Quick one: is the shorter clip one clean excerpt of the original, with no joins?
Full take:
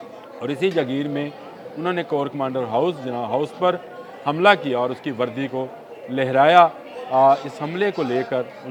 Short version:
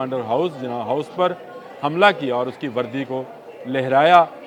yes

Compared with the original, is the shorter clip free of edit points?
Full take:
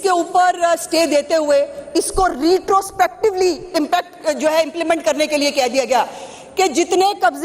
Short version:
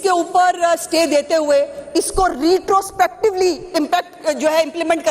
yes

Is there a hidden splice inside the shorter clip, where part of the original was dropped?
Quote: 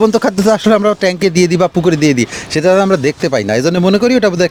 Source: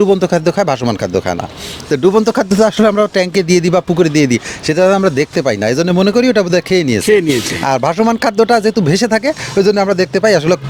no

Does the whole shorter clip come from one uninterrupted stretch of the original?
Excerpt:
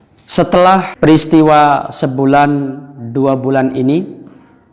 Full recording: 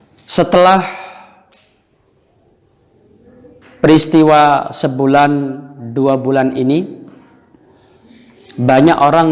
no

